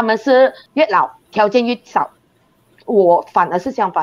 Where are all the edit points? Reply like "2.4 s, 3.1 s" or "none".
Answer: 0.9 s